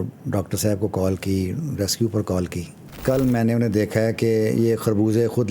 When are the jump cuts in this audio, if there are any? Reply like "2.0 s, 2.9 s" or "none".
3.0 s